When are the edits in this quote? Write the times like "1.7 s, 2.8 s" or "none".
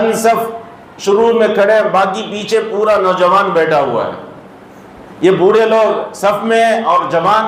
none

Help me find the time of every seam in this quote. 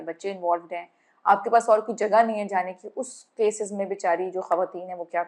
none

